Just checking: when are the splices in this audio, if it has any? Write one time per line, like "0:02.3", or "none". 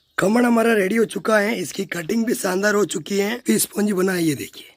0:03.4